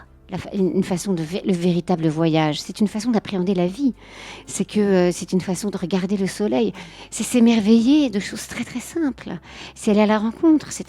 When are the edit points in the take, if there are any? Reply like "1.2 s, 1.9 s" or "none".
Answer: 6.9 s